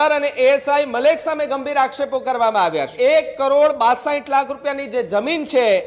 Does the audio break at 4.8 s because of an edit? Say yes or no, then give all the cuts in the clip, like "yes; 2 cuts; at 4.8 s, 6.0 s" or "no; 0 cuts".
no; 1 cut; at 2.9 s